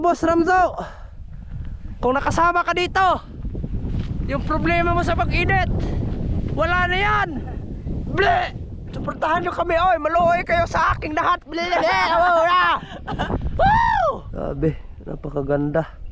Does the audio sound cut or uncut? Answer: cut